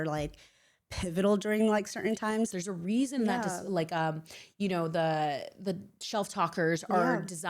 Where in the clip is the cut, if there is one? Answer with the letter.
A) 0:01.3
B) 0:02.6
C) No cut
B